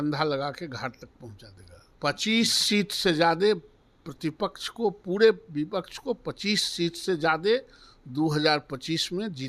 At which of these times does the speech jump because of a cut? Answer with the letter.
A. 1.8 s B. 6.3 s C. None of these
A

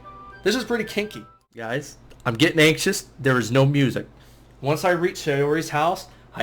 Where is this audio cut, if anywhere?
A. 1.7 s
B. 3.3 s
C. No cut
A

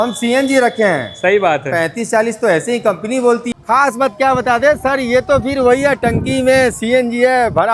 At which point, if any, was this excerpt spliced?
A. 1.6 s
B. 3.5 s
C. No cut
B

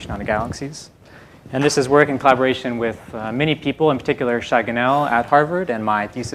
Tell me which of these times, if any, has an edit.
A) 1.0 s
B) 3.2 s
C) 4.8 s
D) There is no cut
B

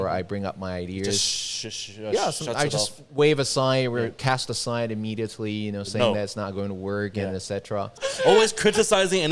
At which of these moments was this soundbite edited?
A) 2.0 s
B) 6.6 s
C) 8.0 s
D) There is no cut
C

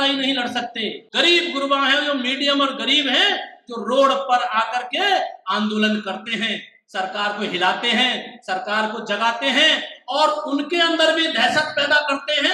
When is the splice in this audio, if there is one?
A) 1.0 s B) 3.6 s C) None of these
A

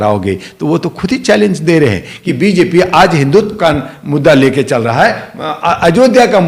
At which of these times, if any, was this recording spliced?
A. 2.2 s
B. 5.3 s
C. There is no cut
A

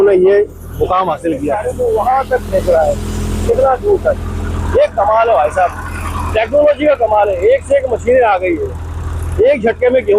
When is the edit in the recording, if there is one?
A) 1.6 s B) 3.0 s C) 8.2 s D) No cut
A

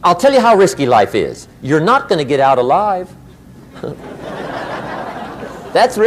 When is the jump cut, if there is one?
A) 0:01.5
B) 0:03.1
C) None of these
C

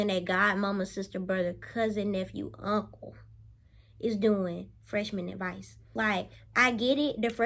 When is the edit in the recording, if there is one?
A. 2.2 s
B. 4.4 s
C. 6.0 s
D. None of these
D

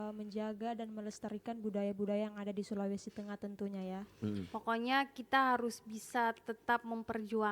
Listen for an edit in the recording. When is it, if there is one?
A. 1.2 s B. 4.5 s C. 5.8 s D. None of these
B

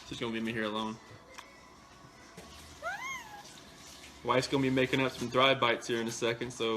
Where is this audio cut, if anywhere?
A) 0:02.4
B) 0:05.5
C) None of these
A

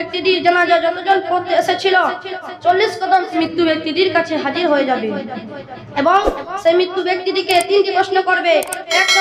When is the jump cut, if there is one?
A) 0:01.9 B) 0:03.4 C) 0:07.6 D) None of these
B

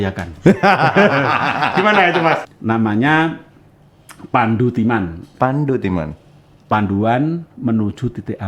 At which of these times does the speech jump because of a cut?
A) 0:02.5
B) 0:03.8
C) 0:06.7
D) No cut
A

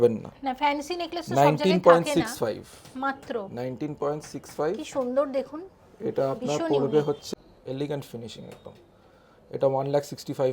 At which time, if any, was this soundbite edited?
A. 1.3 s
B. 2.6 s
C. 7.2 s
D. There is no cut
C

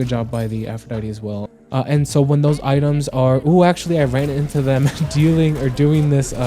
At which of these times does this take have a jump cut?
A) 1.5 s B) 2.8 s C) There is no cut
A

